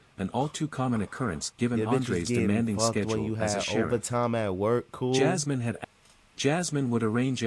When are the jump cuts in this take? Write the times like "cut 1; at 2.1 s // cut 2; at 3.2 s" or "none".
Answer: cut 1; at 5.8 s